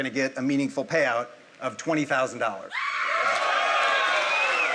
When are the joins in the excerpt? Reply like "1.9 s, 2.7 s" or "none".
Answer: none